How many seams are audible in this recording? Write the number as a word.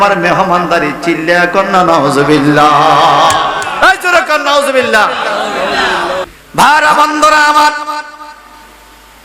one